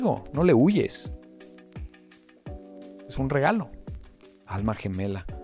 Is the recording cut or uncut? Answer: uncut